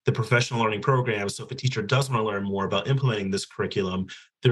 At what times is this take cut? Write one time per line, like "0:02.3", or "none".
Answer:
none